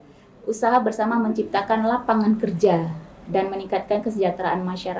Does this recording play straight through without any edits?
yes; 0 cuts

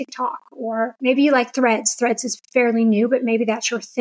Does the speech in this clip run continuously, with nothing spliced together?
no; 1 cut; at 0.9 s

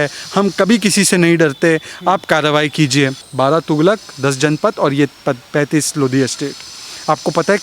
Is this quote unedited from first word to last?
no; 1 cut; at 3.2 s

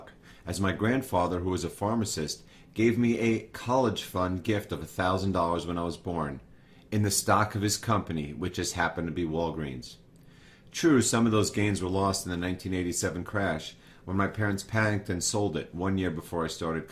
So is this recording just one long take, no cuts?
no; 1 cut; at 4.0 s

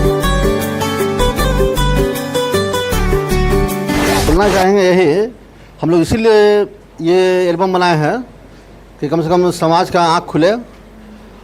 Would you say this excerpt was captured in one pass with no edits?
no; 1 cut; at 4.3 s

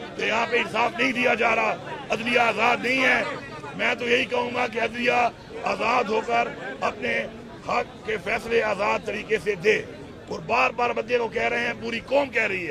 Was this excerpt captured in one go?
yes; 0 cuts

